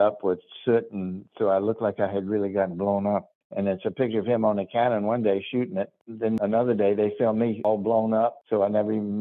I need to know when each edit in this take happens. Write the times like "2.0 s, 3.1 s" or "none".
3.3 s, 6.3 s, 7.6 s, 8.4 s